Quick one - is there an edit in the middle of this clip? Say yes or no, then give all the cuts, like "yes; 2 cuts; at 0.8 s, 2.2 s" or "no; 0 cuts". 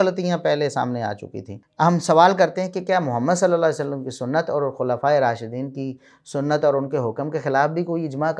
yes; 1 cut; at 1.5 s